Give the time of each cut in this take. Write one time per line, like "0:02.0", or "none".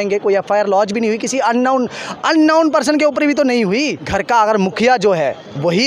0:04.0